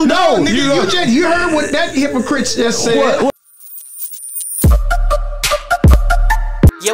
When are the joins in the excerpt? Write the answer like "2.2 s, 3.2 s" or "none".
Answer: 3.3 s